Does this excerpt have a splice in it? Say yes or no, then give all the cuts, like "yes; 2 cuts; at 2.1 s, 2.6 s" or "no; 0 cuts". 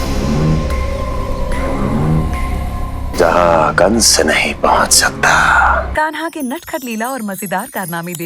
yes; 1 cut; at 5.9 s